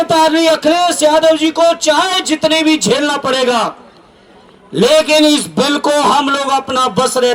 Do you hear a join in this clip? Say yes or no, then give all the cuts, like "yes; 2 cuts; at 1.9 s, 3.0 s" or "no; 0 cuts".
no; 0 cuts